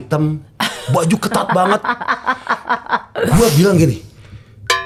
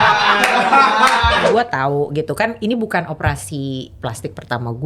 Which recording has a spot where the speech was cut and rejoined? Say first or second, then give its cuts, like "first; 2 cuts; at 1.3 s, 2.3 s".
second; 1 cut; at 1.5 s